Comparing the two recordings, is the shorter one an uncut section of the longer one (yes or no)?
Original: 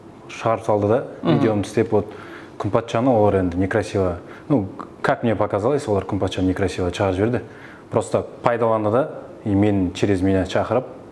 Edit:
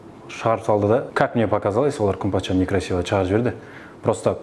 no